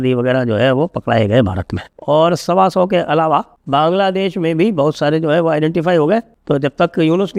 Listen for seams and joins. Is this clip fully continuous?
yes; 0 cuts

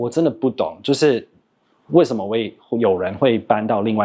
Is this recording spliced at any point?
no; 0 cuts

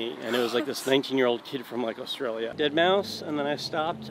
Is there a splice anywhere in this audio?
yes; 1 cut; at 2.5 s

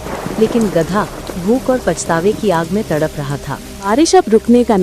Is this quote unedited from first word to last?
no; 1 cut; at 3.9 s

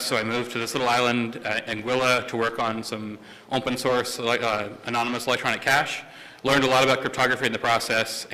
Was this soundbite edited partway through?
yes; 1 cut; at 5.6 s

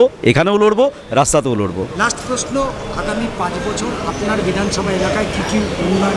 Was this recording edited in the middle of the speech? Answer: no; 0 cuts

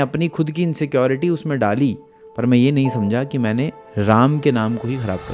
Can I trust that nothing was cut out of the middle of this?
yes; 0 cuts

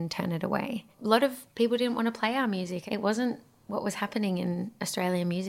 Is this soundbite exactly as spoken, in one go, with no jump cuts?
no; 2 cuts; at 1.2 s, 2.8 s

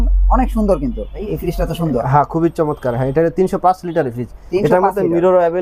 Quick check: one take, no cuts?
no; 1 cut; at 1.3 s

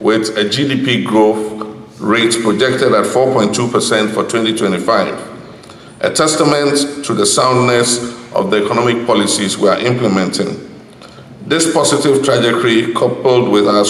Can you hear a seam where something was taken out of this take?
no; 0 cuts

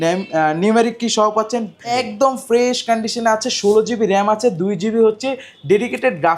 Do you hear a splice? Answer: yes; 1 cut; at 1.9 s

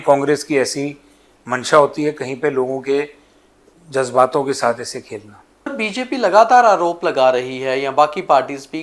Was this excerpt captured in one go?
no; 1 cut; at 5.8 s

